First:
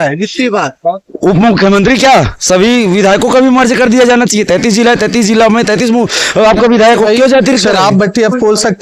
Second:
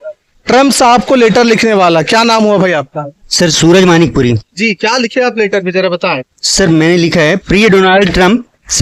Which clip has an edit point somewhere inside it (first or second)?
first